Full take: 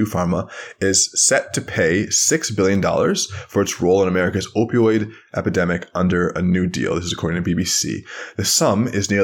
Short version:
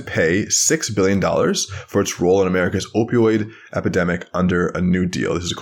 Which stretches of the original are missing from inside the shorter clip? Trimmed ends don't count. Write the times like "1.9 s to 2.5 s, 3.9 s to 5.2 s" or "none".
none